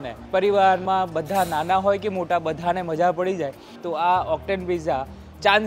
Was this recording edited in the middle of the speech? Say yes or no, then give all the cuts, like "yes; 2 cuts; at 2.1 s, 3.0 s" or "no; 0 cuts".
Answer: yes; 1 cut; at 3.7 s